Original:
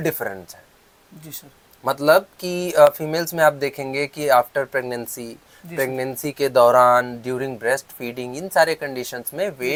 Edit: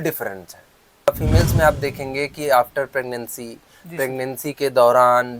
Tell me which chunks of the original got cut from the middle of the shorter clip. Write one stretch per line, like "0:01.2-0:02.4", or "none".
0:01.1-0:02.9